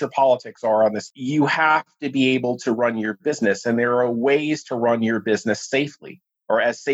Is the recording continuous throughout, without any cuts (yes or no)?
no